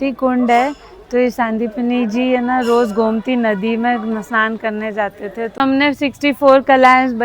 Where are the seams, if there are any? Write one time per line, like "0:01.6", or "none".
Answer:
0:05.5